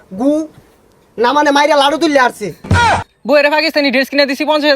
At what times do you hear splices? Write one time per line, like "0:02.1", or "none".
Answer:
0:02.8